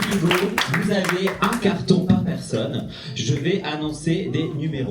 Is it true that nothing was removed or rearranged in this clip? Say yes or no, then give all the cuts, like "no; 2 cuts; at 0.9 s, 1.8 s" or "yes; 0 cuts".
yes; 0 cuts